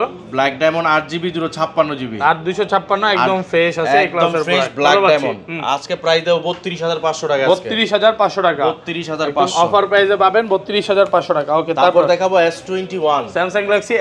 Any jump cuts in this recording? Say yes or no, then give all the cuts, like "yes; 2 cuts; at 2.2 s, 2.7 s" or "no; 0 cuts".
no; 0 cuts